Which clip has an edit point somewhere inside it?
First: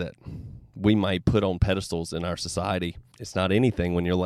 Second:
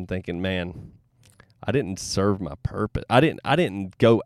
first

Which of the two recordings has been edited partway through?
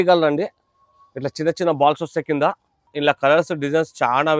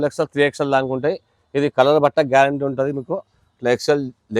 first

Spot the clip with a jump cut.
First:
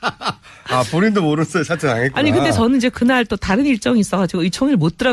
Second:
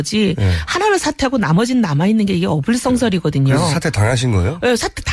second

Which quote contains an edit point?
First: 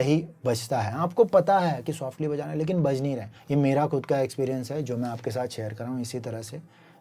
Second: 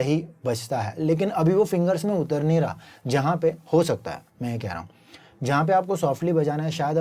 first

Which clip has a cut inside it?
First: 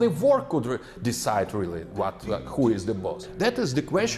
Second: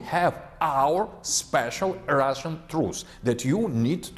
first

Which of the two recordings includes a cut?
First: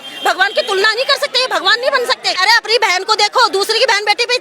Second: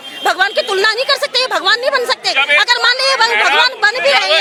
first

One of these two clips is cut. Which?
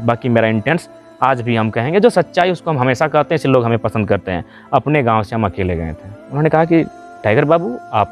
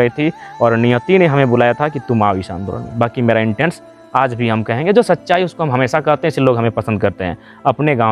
first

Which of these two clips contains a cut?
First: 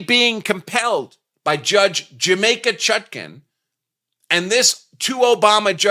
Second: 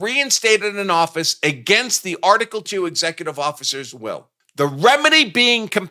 second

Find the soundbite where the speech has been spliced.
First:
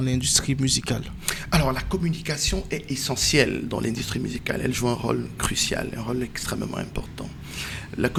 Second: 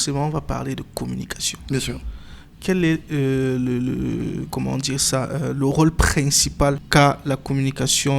second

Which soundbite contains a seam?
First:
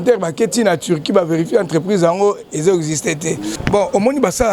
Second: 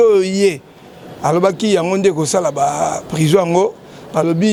first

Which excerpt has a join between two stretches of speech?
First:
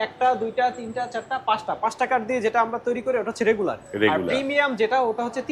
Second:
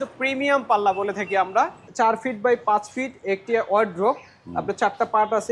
second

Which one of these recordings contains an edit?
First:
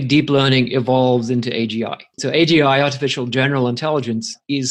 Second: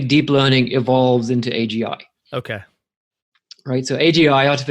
first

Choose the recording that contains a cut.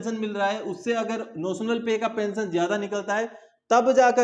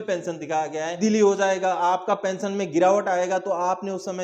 second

